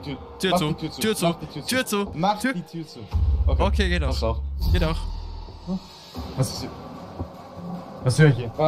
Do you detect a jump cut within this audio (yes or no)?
no